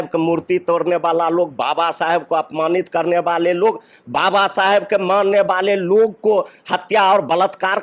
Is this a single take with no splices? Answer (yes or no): yes